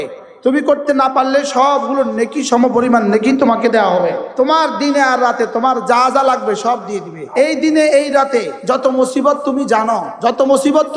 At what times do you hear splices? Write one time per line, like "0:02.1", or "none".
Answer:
0:04.2
0:07.2
0:08.5
0:10.1